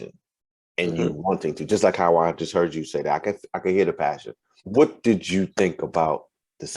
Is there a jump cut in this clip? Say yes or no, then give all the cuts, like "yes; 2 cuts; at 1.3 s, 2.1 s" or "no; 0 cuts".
yes; 1 cut; at 4.6 s